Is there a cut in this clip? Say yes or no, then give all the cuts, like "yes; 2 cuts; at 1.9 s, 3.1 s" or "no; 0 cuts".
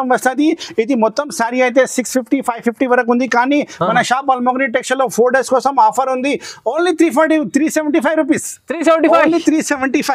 no; 0 cuts